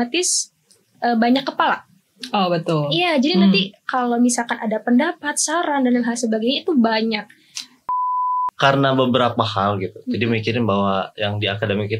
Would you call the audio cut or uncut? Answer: cut